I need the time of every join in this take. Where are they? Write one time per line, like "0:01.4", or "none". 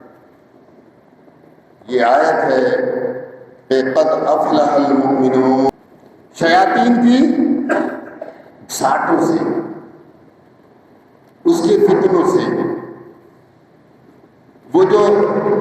0:05.7